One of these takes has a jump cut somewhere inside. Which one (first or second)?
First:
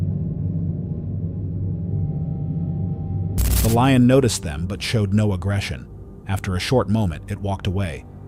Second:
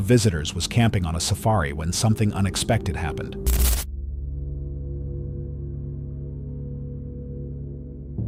first